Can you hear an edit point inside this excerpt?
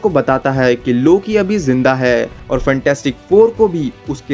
yes; 1 cut; at 2.4 s

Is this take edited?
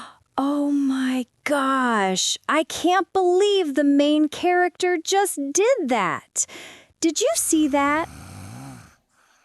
yes; 1 cut; at 8.1 s

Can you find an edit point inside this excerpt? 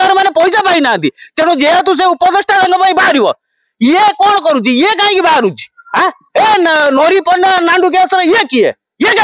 no; 0 cuts

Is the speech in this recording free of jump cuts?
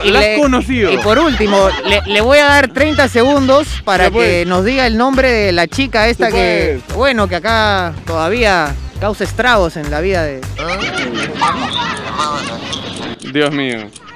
yes; 0 cuts

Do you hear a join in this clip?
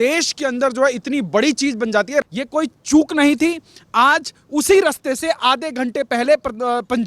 yes; 1 cut; at 2.2 s

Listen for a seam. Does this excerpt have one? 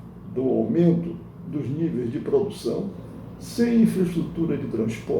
yes; 1 cut; at 3.0 s

